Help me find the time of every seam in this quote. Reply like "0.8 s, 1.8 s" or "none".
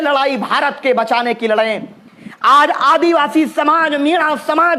none